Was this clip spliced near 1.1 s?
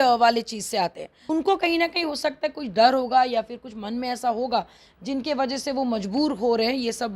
yes; 1 cut; at 1.1 s

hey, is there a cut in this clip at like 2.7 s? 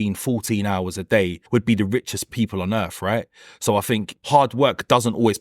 no; 2 cuts; at 1.4 s, 4.1 s

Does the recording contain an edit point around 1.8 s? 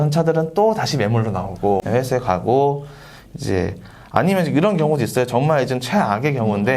yes; 1 cut; at 1.8 s

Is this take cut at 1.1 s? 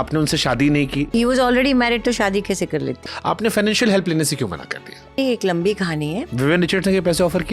yes; 4 cuts; at 1.1 s, 3.1 s, 5.2 s, 6.3 s

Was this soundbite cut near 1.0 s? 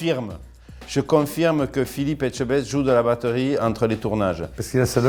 no; 0 cuts

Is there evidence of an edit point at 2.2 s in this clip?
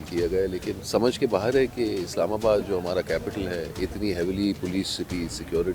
no; 3 cuts; at 0.8 s, 3.7 s, 4.6 s

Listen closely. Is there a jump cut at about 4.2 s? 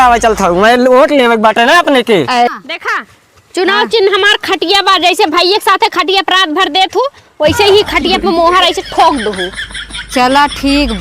no; 1 cut; at 2.5 s

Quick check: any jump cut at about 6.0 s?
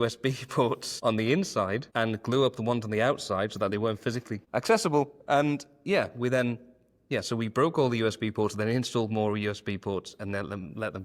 no; 3 cuts; at 0.9 s, 1.9 s, 4.4 s

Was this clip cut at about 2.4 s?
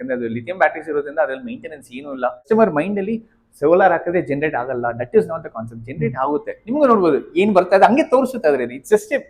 yes; 1 cut; at 2.4 s

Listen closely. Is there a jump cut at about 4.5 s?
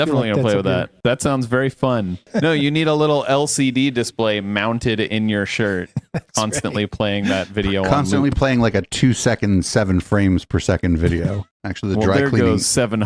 no; 2 cuts; at 2.3 s, 11.4 s

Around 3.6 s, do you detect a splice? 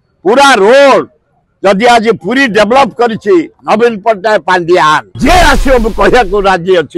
no; 1 cut; at 5.1 s

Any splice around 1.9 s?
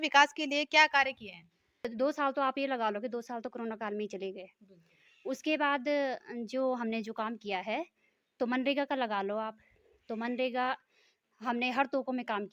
yes; 1 cut; at 1.9 s

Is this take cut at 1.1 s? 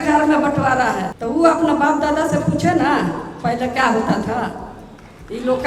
yes; 1 cut; at 1.1 s

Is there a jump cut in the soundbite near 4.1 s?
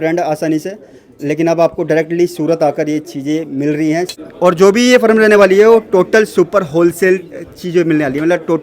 yes; 1 cut; at 4.1 s

